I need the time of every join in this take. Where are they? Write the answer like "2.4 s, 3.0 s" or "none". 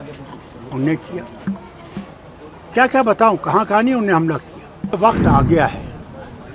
5.0 s